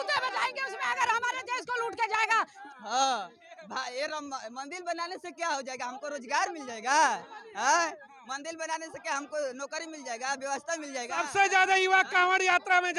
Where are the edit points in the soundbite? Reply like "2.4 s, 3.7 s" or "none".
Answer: 2.6 s